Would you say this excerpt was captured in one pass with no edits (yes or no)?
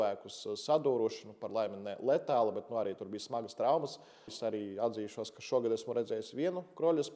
no